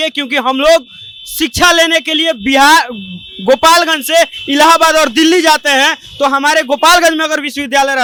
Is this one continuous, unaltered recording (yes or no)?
yes